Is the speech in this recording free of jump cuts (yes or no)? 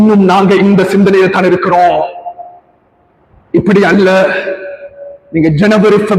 yes